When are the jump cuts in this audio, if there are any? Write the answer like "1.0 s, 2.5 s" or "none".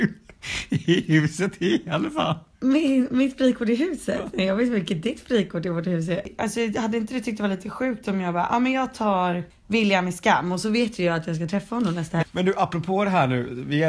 6.3 s, 9.5 s, 12.3 s

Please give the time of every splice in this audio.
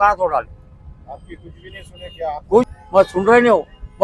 2.7 s

